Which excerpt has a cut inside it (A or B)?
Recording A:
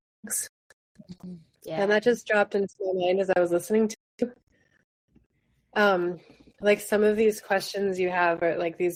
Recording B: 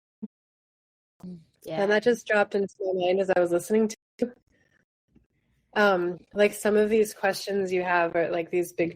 B